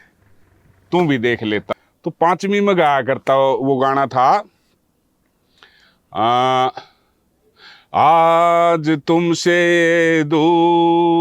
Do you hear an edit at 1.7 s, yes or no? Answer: yes